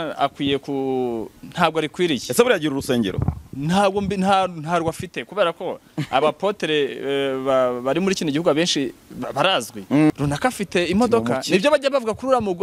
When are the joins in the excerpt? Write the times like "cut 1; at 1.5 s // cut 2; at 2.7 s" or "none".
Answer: cut 1; at 10.1 s